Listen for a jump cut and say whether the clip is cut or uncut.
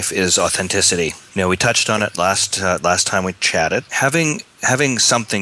cut